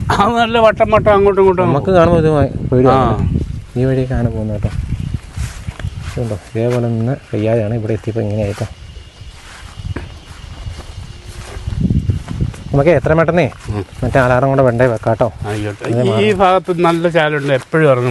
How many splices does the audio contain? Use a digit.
0